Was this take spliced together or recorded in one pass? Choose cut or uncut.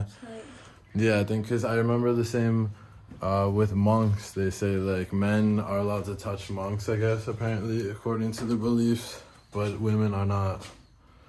uncut